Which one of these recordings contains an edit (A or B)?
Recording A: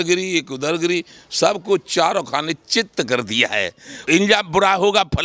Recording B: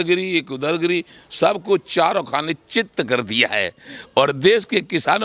A